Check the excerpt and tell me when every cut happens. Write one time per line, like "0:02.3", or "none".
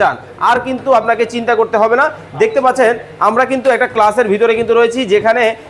none